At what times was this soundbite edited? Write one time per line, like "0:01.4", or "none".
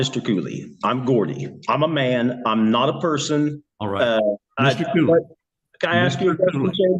none